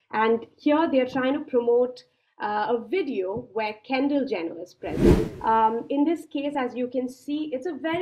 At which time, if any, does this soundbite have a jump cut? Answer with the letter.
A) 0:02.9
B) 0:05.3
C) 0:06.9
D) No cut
B